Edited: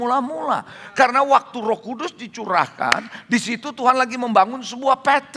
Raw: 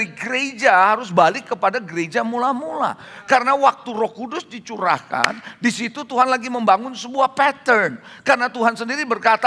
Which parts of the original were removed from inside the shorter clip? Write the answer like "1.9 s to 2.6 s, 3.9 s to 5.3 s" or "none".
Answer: none